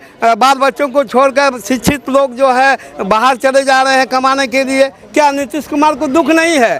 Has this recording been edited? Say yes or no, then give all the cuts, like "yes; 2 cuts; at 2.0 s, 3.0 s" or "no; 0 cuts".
no; 0 cuts